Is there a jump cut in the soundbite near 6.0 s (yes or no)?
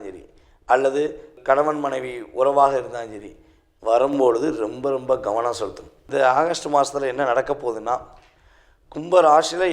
yes